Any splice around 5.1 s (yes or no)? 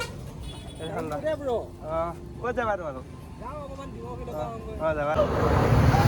yes